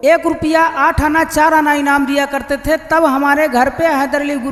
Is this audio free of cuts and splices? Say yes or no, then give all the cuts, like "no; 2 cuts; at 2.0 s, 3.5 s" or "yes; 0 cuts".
yes; 0 cuts